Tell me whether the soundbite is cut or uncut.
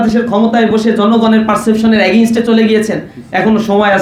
uncut